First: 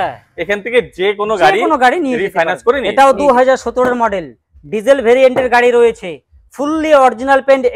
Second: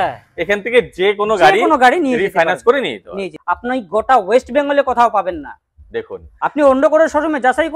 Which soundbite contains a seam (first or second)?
second